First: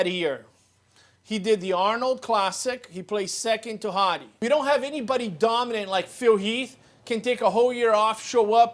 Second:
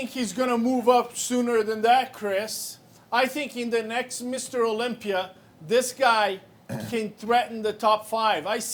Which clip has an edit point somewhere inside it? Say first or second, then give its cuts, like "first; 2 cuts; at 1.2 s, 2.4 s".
first; 1 cut; at 4.3 s